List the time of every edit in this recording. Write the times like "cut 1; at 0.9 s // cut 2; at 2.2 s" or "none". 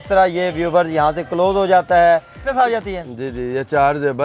cut 1; at 2.5 s